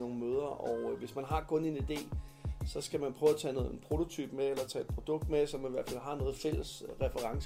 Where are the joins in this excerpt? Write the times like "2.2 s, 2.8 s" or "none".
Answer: none